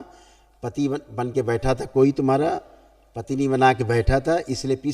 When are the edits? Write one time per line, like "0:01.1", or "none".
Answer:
none